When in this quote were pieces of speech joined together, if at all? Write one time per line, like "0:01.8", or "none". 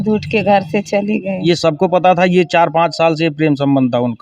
0:01.4